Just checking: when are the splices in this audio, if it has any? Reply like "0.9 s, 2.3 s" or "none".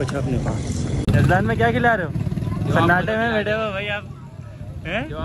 1.1 s

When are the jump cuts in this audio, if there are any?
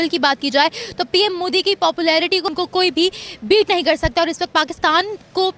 none

